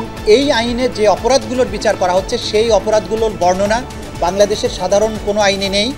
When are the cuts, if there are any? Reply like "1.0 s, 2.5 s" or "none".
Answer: none